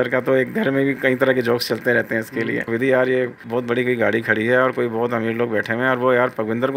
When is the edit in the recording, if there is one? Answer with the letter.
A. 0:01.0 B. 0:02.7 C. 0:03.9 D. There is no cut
B